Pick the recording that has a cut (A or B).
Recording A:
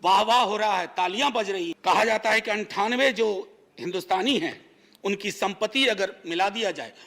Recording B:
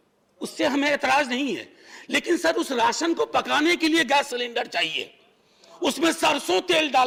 A